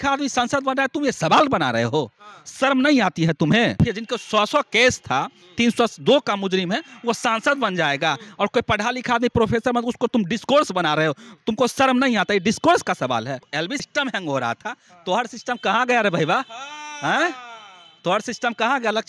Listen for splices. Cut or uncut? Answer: cut